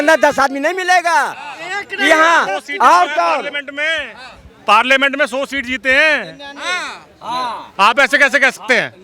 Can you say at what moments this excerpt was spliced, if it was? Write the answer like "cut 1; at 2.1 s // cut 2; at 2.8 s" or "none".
none